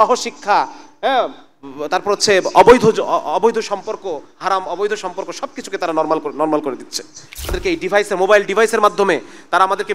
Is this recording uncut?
no; 1 cut; at 7.6 s

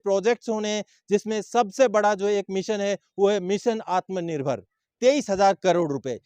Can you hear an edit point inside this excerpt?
yes; 1 cut; at 4.8 s

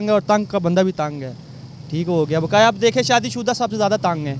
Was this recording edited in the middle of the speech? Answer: no; 0 cuts

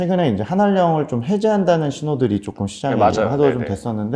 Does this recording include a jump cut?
no; 0 cuts

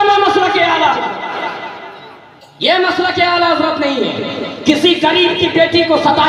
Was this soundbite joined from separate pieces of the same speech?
no; 0 cuts

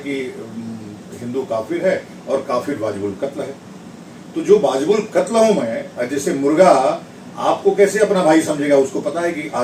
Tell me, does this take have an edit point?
no; 0 cuts

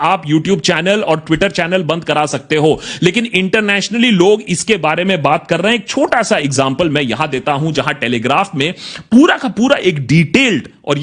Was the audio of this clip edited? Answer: no; 0 cuts

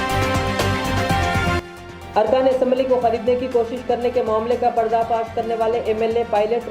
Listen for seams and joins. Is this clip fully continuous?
no; 1 cut; at 1.6 s

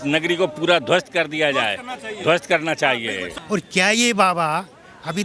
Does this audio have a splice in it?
yes; 1 cut; at 3.3 s

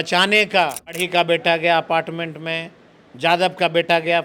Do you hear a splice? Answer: yes; 1 cut; at 1.0 s

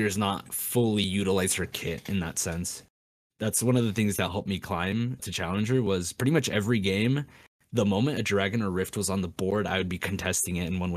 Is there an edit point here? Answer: no; 0 cuts

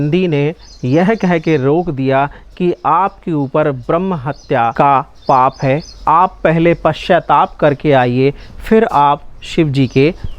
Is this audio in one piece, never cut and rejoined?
no; 1 cut; at 4.7 s

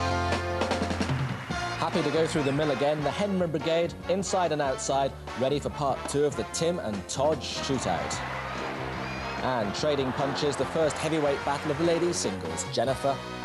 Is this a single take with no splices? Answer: yes; 0 cuts

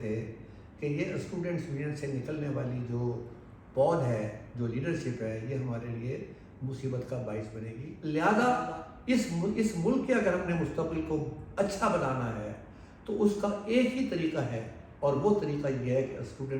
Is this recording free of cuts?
no; 1 cut; at 7.8 s

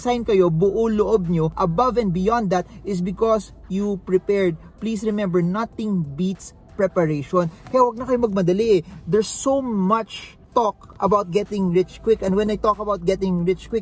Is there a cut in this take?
no; 0 cuts

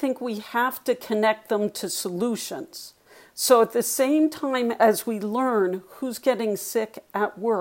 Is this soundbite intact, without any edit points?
yes; 0 cuts

